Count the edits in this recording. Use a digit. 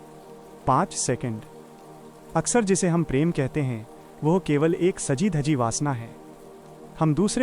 1